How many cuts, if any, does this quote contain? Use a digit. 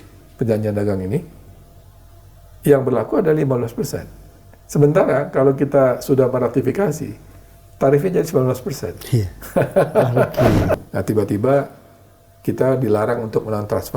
1